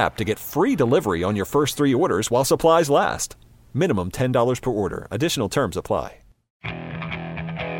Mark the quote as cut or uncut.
cut